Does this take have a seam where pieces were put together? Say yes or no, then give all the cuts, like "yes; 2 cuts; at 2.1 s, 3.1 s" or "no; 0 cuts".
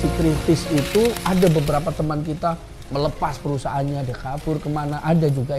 no; 0 cuts